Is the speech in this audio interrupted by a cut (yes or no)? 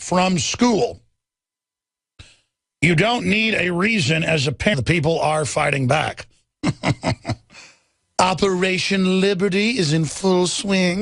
no